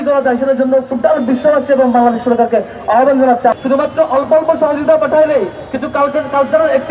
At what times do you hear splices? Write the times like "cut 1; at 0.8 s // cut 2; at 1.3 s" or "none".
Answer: cut 1; at 3.5 s